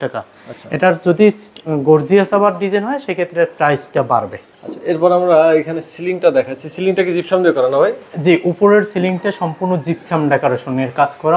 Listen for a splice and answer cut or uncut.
uncut